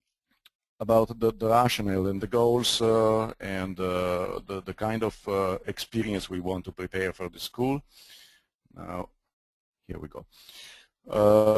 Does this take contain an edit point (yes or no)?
yes